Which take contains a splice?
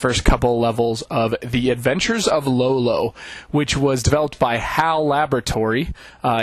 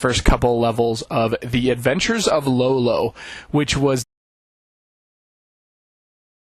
first; 1 cut; at 4.0 s

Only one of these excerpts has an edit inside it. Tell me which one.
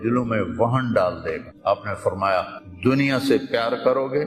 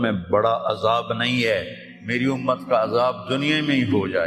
first; 2 cuts; at 1.5 s, 2.6 s

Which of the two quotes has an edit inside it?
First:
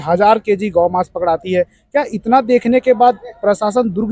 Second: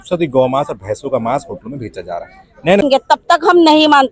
second; 1 cut; at 2.8 s

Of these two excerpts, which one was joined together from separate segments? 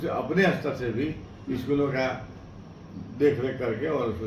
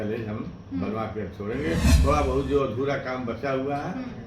second; 1 cut; at 1.9 s

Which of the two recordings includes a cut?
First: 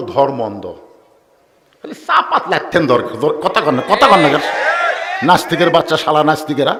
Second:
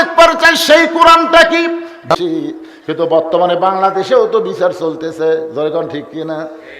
second; 1 cut; at 2.1 s

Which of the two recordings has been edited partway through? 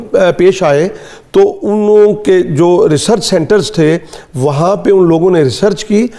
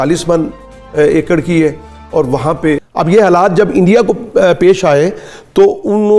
second; 1 cut; at 2.9 s

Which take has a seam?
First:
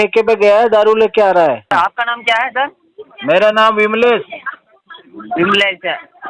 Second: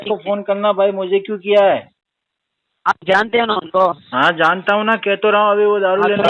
first; 1 cut; at 1.7 s

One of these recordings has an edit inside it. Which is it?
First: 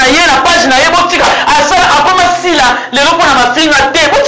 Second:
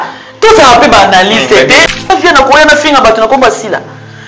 second; 1 cut; at 1.9 s

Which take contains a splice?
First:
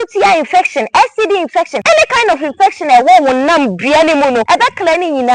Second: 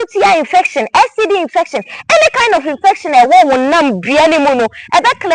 first; 2 cuts; at 1.8 s, 4.4 s

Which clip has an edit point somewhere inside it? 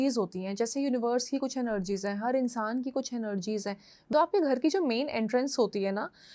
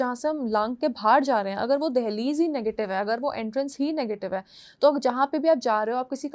first; 1 cut; at 4.1 s

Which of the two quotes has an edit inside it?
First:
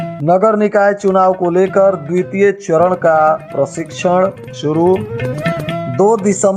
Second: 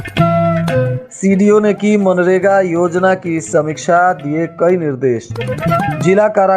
second; 1 cut; at 1.0 s

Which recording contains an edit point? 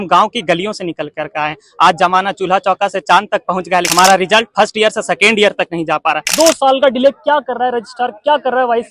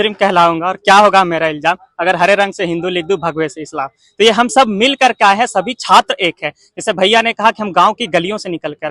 first; 2 cuts; at 3.9 s, 6.3 s

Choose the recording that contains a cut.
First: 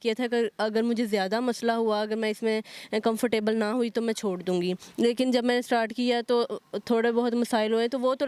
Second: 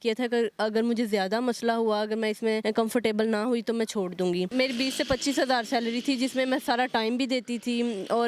second; 2 cuts; at 2.6 s, 4.5 s

